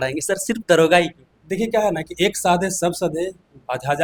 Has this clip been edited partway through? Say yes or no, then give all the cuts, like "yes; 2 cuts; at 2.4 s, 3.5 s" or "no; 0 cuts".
no; 0 cuts